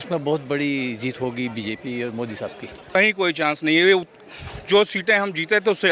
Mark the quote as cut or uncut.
cut